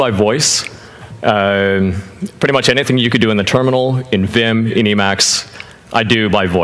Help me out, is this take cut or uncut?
cut